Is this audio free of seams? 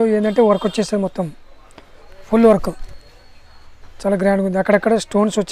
yes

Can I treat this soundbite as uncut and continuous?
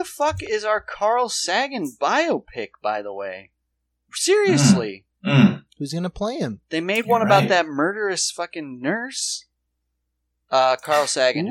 yes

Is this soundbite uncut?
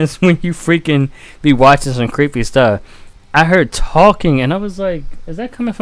yes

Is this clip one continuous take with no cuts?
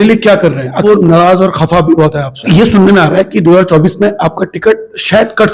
no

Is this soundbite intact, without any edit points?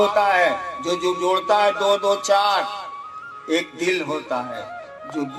yes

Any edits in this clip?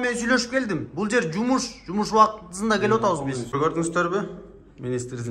yes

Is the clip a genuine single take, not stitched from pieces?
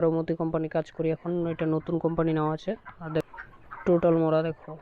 no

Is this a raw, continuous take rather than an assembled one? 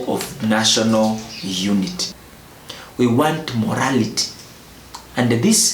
no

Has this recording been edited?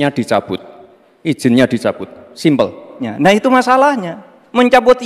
yes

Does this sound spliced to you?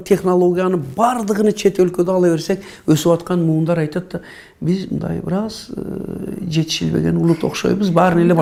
no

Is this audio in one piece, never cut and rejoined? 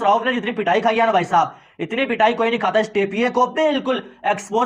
yes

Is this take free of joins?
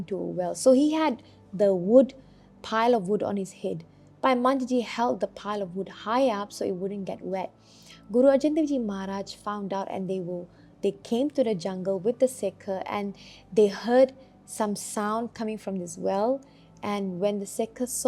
yes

